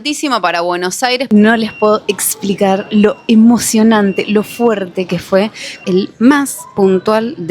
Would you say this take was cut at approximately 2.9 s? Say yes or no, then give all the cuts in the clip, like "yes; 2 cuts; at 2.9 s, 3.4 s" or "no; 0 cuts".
no; 2 cuts; at 1.2 s, 5.8 s